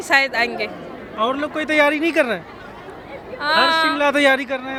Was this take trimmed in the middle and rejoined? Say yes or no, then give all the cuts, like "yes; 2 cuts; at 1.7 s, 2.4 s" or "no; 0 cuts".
no; 0 cuts